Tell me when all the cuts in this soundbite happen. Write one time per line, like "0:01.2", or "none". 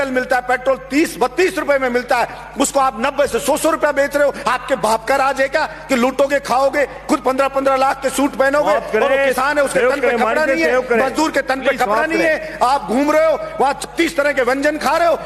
none